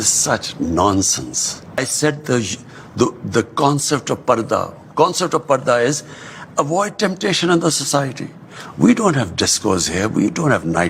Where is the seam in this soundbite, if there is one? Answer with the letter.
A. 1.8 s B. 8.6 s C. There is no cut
A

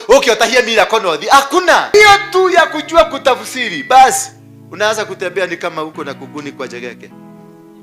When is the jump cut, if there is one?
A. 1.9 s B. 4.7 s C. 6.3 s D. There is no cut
A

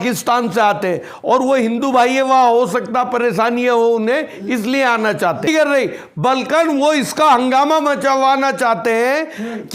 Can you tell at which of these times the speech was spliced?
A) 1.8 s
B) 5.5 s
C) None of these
B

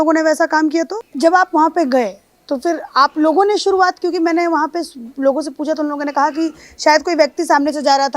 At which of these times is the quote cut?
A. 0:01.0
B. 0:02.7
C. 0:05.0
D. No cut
A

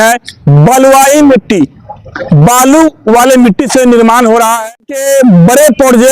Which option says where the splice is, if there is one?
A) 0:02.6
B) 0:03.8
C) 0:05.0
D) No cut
C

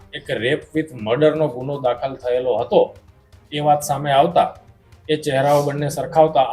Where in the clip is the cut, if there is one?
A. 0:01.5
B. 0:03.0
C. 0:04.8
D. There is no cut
D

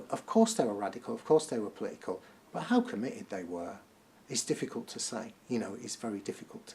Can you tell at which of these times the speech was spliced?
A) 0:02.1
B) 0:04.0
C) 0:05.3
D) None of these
D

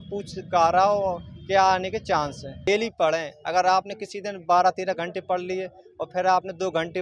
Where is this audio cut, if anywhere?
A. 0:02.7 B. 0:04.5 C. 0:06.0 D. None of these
A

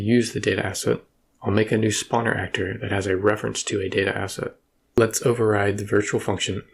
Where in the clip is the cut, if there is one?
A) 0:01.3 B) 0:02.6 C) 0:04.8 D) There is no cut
C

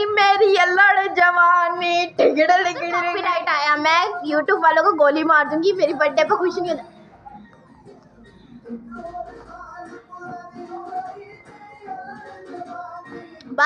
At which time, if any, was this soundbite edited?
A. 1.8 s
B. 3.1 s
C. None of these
B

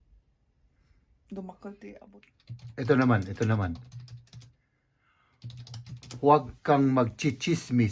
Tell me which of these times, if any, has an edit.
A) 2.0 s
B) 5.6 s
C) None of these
A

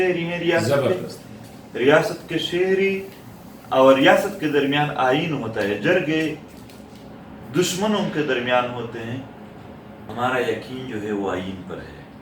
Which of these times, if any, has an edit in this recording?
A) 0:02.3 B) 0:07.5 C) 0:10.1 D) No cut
C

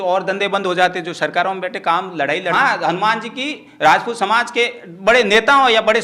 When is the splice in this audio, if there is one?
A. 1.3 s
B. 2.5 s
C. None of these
B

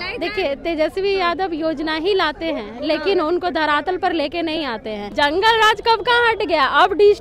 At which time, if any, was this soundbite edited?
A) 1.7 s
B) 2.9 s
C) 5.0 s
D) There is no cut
C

